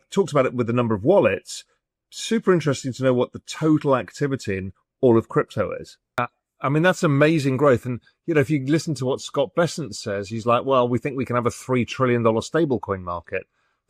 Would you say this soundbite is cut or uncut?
cut